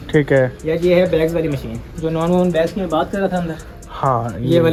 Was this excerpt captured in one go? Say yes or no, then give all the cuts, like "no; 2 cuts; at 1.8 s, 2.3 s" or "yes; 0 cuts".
yes; 0 cuts